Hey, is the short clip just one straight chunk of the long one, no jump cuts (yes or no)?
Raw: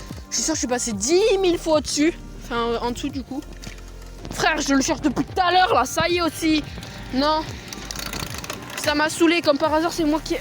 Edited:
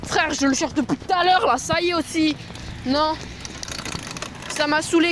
yes